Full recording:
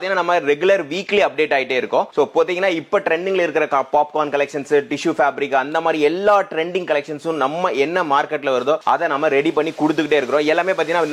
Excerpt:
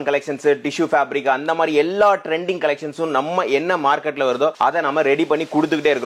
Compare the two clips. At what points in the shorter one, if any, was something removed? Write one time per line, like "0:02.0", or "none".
none